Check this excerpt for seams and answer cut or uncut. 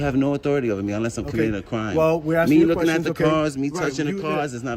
uncut